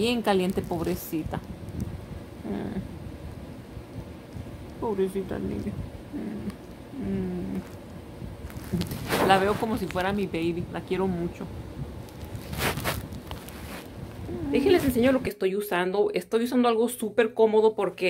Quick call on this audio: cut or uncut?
cut